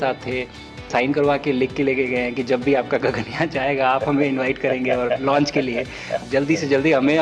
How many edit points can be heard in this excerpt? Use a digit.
2